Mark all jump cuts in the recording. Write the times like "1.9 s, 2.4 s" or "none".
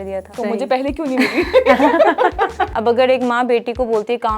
2.7 s